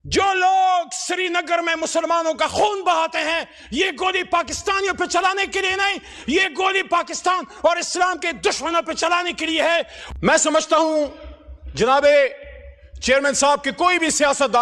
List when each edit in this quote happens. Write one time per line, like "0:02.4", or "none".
0:10.0